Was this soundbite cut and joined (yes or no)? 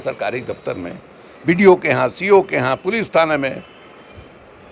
no